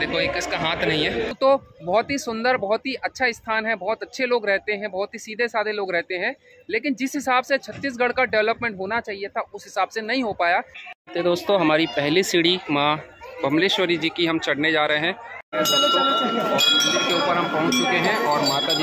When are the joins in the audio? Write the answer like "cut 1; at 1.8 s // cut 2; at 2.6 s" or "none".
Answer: cut 1; at 1.3 s // cut 2; at 10.8 s // cut 3; at 15.4 s